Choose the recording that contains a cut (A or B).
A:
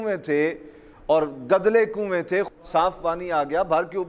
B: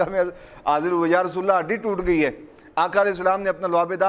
A